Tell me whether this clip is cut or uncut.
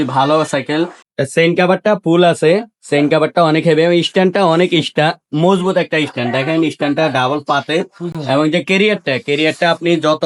uncut